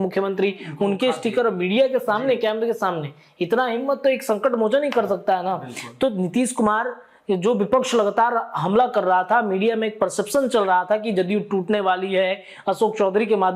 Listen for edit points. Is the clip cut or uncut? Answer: uncut